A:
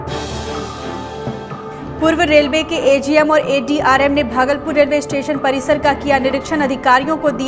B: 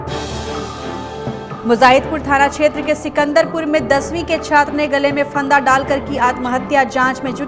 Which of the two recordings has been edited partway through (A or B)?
A